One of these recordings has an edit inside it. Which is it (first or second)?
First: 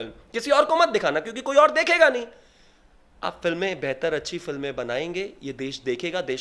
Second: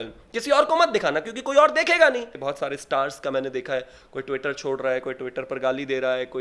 second